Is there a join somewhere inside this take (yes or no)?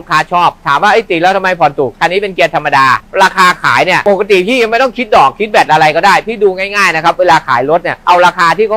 yes